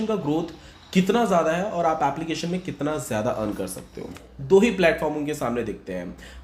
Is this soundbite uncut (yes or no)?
no